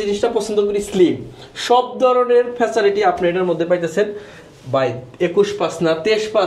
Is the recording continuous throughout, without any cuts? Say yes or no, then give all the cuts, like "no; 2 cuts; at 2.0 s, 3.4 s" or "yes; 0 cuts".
yes; 0 cuts